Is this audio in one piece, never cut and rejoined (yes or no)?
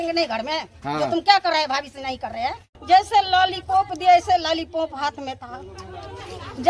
no